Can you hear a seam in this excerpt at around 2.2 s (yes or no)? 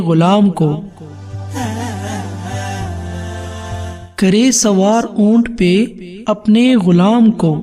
no